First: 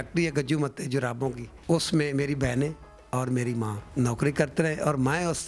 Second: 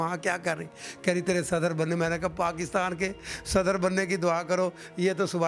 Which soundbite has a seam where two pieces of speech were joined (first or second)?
first